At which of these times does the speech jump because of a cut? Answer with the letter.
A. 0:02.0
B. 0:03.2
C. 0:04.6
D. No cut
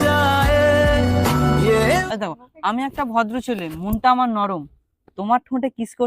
A